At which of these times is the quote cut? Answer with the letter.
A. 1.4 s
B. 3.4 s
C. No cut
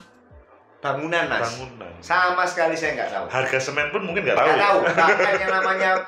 C